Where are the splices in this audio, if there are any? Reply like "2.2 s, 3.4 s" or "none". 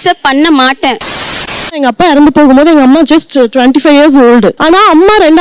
1.4 s, 4.6 s